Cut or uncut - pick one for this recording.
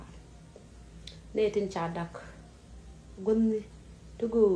cut